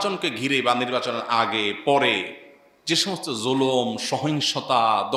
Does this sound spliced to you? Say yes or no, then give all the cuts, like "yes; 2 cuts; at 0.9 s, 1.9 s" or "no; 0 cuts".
no; 0 cuts